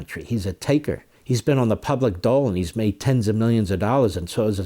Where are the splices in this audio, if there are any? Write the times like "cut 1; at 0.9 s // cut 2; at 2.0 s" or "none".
cut 1; at 1.1 s